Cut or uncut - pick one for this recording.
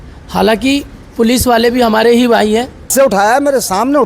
cut